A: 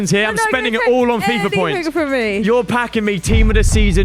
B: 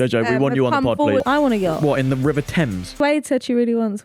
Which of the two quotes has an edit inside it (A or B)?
B